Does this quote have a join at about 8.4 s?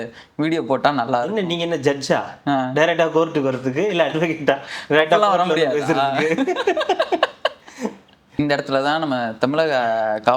yes; 1 cut; at 8.4 s

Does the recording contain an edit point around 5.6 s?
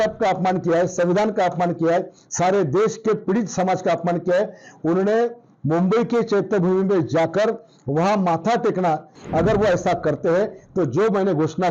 no; 1 cut; at 9.2 s

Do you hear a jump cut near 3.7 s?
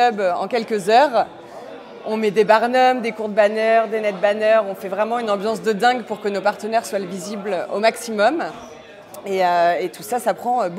no; 0 cuts

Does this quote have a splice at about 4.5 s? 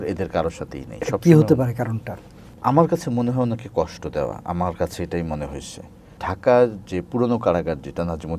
no; 2 cuts; at 2.4 s, 6.2 s

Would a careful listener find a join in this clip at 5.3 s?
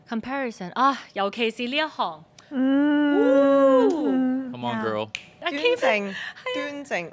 yes; 1 cut; at 5.3 s

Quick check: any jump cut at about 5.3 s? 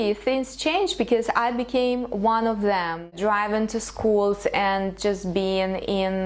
no; 1 cut; at 3.2 s

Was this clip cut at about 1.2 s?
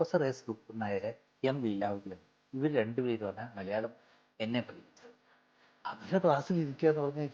yes; 1 cut; at 1.2 s

